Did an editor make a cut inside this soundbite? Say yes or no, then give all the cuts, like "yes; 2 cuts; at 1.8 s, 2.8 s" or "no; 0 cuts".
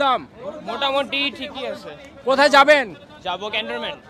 no; 0 cuts